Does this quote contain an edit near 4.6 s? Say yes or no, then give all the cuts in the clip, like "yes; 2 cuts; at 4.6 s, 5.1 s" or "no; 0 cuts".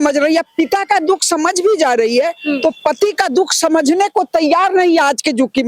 no; 0 cuts